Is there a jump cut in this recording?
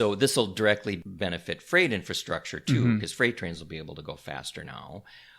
yes; 1 cut; at 1.0 s

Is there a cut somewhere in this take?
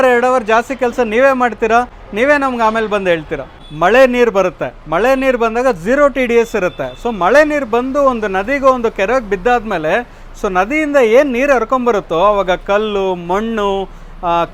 no; 0 cuts

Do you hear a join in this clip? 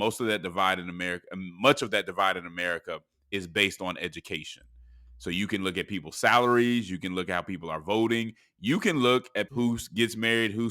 yes; 1 cut; at 9.5 s

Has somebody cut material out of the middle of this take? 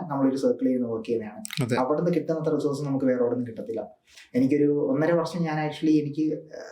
no; 0 cuts

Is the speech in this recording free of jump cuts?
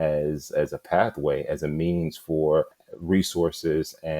no; 1 cut; at 2.8 s

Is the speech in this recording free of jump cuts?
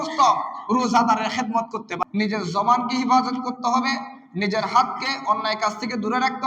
no; 1 cut; at 1.8 s

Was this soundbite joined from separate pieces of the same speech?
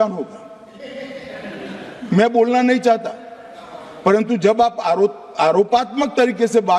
no; 0 cuts

